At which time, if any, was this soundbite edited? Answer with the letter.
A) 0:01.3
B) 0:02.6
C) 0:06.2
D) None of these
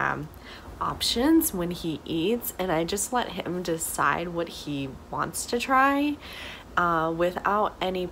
D